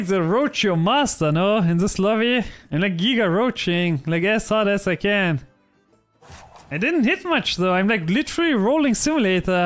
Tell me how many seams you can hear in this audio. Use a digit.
0